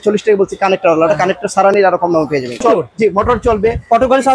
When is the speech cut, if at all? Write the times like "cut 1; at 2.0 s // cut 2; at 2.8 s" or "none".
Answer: cut 1; at 2.8 s